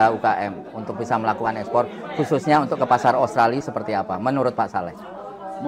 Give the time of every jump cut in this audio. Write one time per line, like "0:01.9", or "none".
none